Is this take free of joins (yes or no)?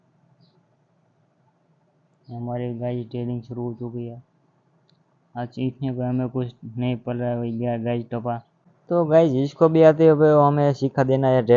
yes